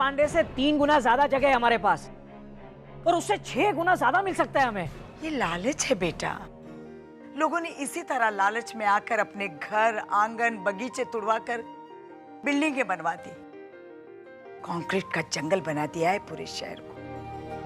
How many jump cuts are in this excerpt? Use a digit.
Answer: 0